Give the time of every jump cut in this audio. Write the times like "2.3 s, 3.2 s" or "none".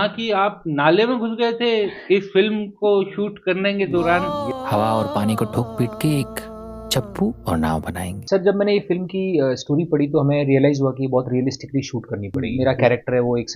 4.3 s, 8.2 s, 12.4 s